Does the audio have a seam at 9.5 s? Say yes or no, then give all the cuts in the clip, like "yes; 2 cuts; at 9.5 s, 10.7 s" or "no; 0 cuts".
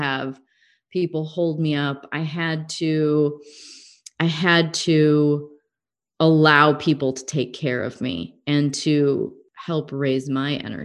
yes; 1 cut; at 9.5 s